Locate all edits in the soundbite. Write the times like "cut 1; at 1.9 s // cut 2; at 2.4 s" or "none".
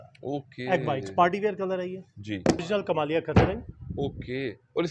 cut 1; at 2.6 s